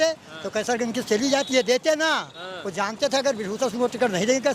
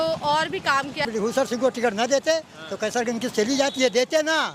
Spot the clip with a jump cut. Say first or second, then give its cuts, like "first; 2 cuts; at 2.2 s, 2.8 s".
second; 1 cut; at 1.0 s